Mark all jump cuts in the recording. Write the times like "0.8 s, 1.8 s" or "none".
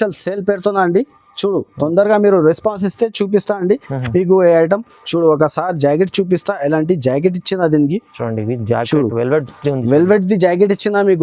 none